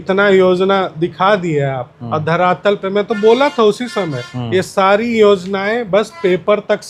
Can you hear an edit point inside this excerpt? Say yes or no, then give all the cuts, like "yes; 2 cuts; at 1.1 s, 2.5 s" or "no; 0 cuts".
no; 0 cuts